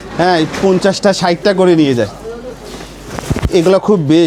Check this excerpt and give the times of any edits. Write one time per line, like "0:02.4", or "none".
none